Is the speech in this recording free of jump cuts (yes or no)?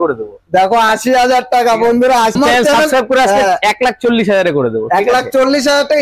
no